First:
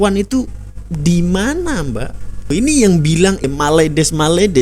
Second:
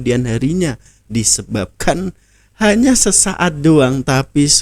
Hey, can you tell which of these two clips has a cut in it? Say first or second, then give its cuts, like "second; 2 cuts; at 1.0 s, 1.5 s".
first; 2 cuts; at 2.5 s, 3.5 s